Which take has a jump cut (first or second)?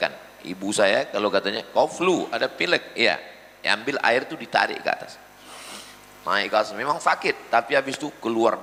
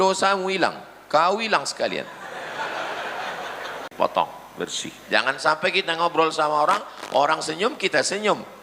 second